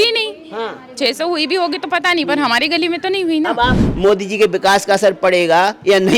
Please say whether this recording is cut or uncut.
cut